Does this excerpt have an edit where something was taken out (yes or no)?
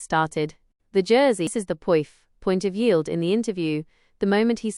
yes